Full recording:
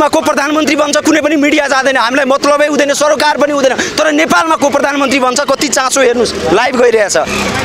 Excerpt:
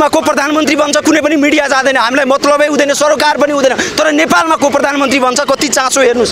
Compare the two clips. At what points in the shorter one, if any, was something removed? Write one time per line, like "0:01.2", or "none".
none